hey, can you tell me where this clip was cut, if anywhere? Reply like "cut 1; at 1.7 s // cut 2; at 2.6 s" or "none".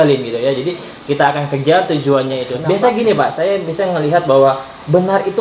cut 1; at 2.5 s